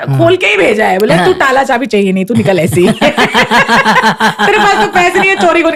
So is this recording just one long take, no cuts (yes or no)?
yes